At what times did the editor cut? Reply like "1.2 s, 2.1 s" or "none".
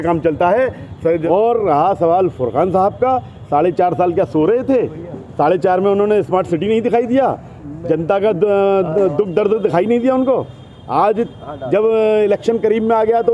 1.2 s